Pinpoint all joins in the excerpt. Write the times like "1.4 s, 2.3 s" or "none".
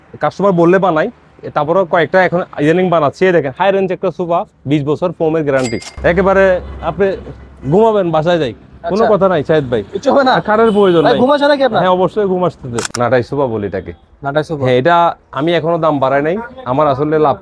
5.9 s, 12.9 s

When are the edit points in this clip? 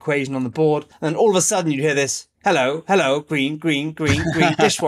0.9 s

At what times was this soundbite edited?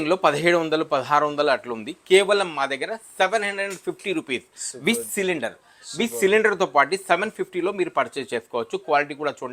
none

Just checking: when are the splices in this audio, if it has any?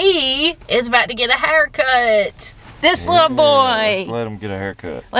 none

